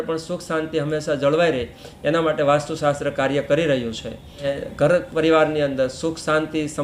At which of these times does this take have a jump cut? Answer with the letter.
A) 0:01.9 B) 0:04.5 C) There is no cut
B